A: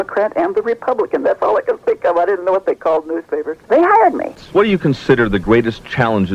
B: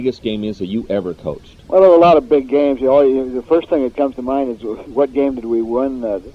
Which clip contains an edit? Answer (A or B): A